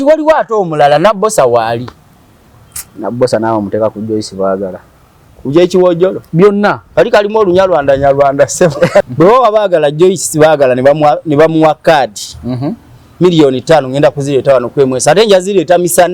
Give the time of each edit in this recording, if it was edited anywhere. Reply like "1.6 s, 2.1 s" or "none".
9.1 s